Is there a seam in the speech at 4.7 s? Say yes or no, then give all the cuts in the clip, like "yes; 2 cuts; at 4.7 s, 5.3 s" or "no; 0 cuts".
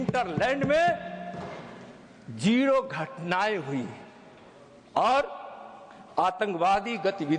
no; 0 cuts